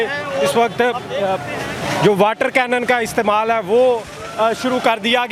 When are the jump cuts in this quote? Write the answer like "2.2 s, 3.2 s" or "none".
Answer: none

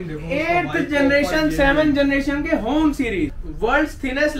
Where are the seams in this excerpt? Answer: 3.4 s

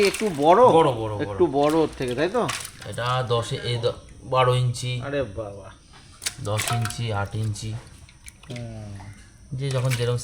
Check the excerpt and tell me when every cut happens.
none

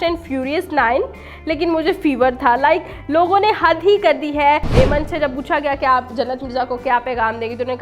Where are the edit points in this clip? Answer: 4.7 s

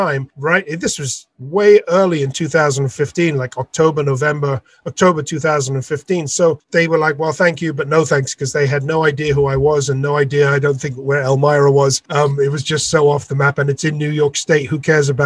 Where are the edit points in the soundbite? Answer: none

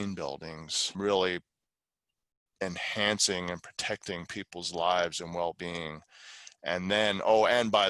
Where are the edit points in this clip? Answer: 0.9 s

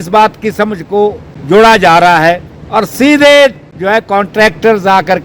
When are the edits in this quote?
1.3 s, 2.5 s, 3.7 s

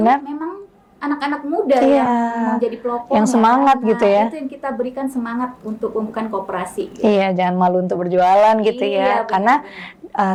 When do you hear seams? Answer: none

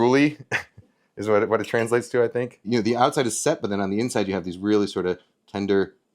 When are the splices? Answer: 2.7 s

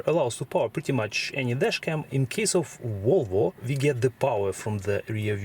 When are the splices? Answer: 2.1 s, 3.6 s

